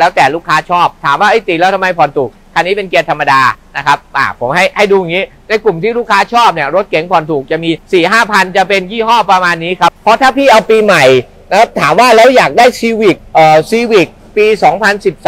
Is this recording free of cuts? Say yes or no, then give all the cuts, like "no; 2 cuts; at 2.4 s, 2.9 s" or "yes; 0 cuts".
yes; 0 cuts